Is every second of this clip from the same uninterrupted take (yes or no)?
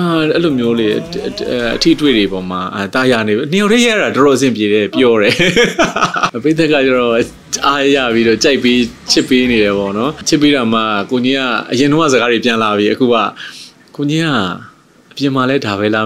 no